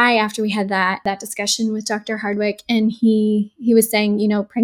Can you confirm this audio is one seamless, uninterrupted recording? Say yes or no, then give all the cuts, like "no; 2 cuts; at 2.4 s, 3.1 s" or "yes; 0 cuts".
no; 1 cut; at 1.0 s